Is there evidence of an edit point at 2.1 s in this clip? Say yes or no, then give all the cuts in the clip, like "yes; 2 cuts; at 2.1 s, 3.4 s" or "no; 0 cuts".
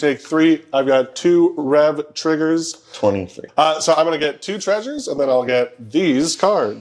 no; 1 cut; at 3.4 s